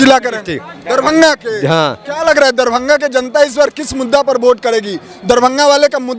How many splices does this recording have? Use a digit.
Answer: 0